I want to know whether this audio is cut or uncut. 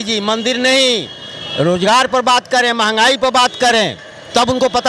uncut